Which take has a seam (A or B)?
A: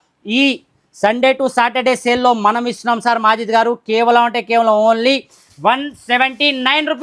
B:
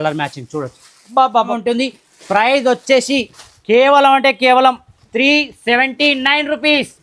B